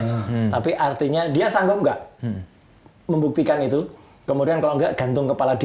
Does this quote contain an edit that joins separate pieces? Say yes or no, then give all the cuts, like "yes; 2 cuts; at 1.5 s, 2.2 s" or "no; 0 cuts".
no; 0 cuts